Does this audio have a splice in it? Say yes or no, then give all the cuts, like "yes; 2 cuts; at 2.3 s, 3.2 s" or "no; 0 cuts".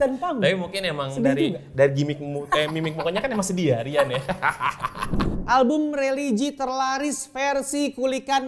yes; 1 cut; at 5.1 s